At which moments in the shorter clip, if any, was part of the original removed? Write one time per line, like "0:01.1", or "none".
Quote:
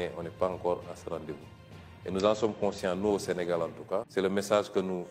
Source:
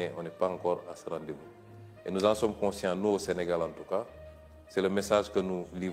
0:04.1